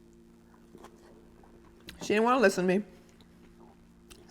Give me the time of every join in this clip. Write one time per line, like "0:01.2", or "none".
0:01.9